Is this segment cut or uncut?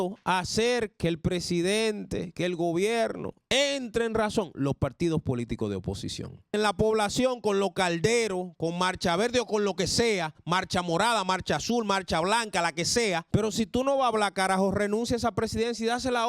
cut